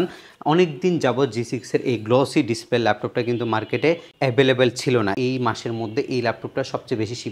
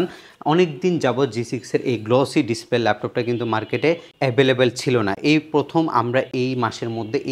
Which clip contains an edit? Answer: first; 1 cut; at 5.1 s

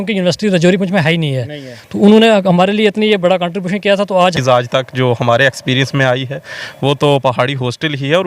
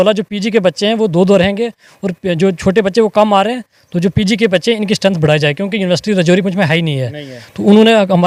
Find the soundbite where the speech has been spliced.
first; 1 cut; at 4.3 s

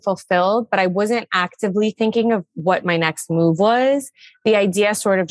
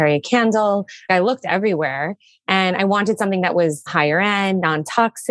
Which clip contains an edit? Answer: second; 2 cuts; at 1.1 s, 3.9 s

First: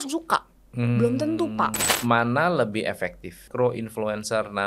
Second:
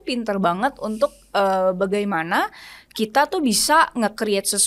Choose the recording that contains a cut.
first; 2 cuts; at 1.9 s, 3.4 s

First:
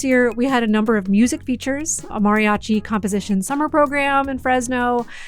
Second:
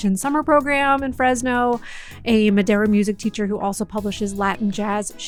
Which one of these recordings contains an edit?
first; 1 cut; at 2.1 s

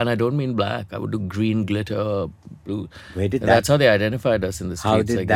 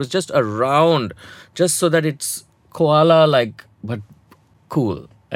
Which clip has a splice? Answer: first; 1 cut; at 3.0 s

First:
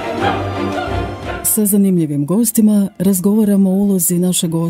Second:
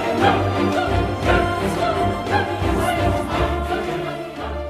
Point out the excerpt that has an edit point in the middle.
second; 1 cut; at 1.0 s

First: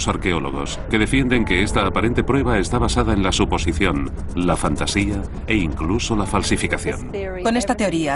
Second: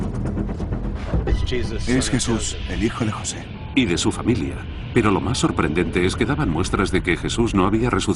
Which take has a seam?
first; 1 cut; at 1.0 s

